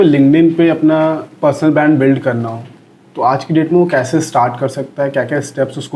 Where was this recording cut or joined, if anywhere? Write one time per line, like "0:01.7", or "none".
none